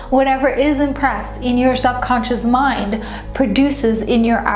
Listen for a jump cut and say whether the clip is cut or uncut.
uncut